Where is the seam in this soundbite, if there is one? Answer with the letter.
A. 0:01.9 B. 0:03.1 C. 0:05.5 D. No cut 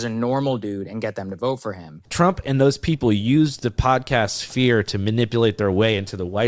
A